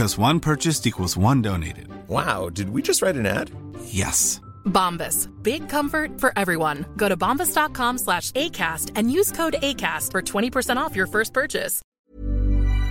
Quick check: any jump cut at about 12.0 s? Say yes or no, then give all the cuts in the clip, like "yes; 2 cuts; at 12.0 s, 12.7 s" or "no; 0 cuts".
yes; 1 cut; at 12.0 s